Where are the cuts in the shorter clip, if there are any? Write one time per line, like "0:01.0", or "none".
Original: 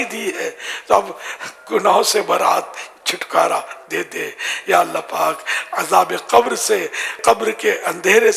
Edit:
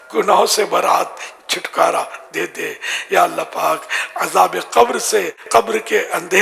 0:05.4